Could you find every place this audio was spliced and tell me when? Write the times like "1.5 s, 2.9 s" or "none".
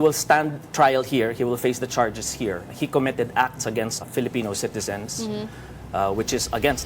2.7 s, 4.1 s

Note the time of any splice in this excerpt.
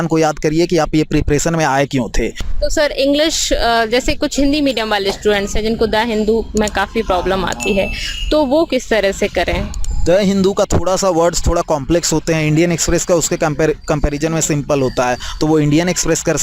2.4 s

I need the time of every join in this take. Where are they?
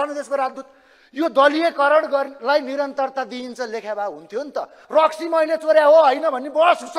4.8 s

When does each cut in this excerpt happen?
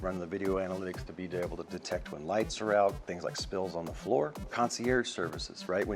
3.1 s, 4.5 s

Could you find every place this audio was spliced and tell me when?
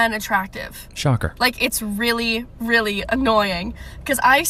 none

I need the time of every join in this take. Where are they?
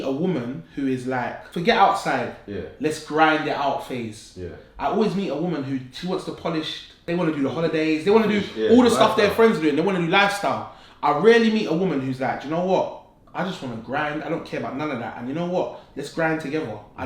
1.4 s, 6.9 s

